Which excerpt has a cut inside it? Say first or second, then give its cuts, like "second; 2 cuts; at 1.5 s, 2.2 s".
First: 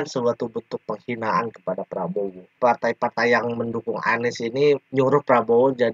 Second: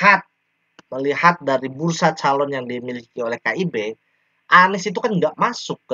first; 1 cut; at 2.6 s